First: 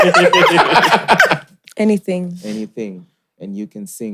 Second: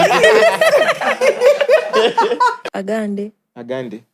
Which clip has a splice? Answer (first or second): second